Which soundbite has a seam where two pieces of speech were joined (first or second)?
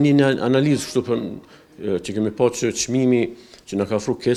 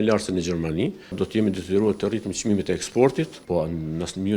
second